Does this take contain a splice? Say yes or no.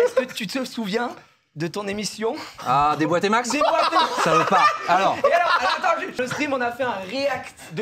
yes